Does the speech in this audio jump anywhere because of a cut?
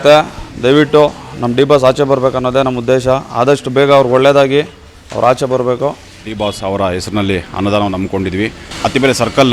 yes; 2 cuts; at 6.1 s, 8.6 s

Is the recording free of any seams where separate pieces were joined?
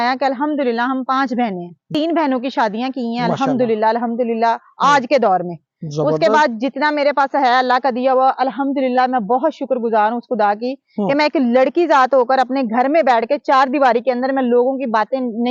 no; 1 cut; at 1.9 s

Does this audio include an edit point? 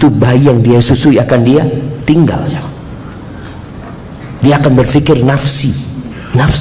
no; 0 cuts

